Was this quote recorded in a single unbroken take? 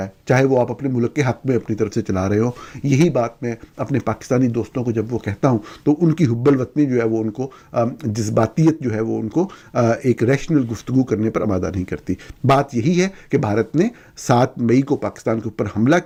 yes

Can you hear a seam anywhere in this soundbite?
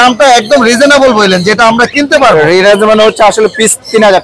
no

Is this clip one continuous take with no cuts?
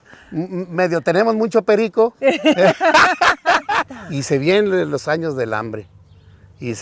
no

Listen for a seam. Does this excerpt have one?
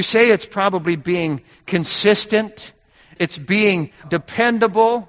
yes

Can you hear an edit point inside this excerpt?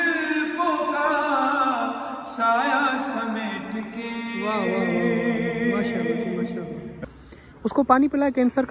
yes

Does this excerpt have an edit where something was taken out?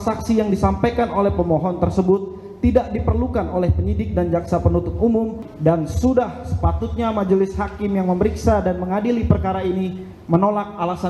yes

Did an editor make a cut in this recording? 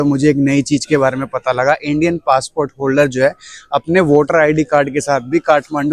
no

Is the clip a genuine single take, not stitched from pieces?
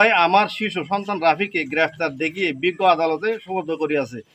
yes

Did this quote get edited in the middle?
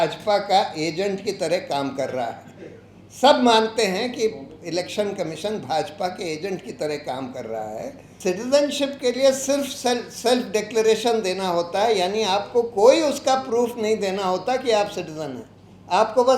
yes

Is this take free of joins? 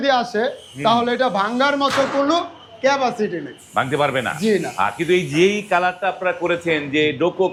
yes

